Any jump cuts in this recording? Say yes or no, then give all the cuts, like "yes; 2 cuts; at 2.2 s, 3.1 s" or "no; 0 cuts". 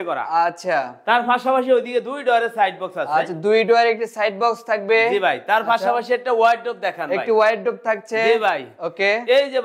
no; 0 cuts